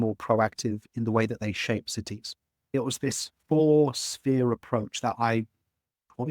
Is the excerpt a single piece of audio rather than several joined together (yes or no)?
no